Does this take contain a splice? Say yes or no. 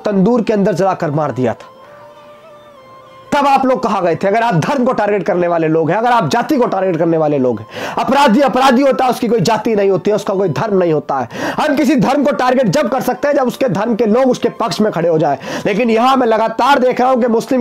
no